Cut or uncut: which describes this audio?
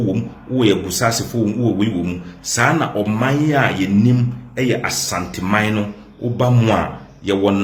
uncut